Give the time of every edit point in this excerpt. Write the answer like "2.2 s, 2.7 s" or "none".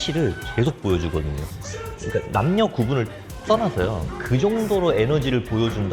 2.0 s